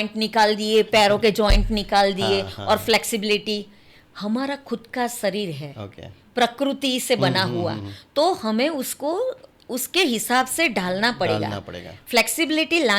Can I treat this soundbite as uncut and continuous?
yes; 0 cuts

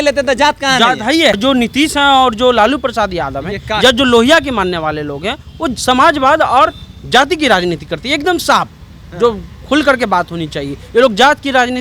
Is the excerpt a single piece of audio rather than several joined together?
no; 1 cut; at 1.4 s

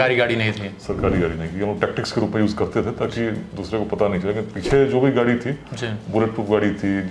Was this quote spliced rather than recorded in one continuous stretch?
no; 0 cuts

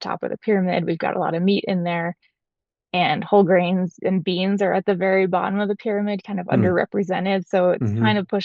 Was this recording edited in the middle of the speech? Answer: no; 0 cuts

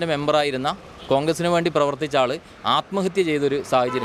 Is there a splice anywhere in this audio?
no; 0 cuts

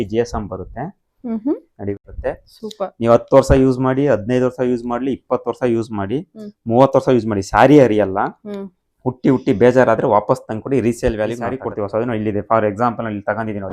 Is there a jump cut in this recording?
yes; 2 cuts; at 2.0 s, 11.6 s

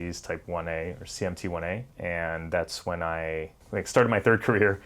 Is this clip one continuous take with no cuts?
no; 2 cuts; at 1.9 s, 3.7 s

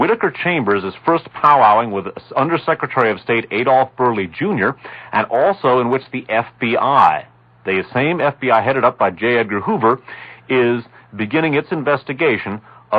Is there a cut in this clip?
no; 0 cuts

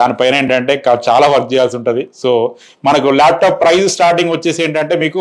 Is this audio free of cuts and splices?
no; 1 cut; at 2.7 s

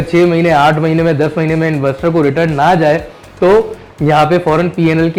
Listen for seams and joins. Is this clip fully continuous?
yes; 0 cuts

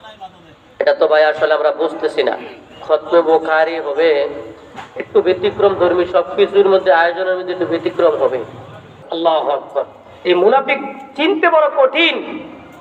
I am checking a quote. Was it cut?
yes; 1 cut; at 8.9 s

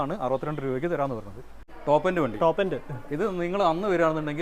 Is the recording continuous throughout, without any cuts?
no; 1 cut; at 1.7 s

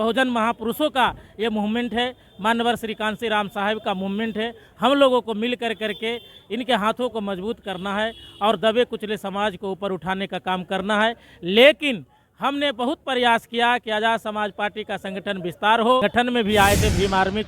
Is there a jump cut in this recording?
yes; 1 cut; at 16.0 s

